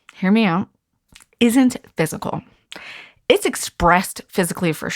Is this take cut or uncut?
uncut